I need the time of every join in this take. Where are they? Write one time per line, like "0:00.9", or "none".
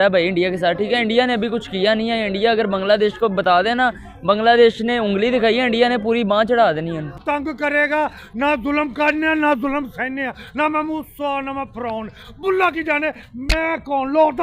0:07.2